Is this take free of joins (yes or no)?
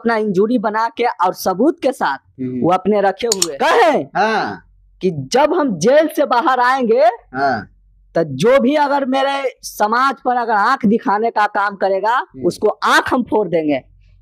no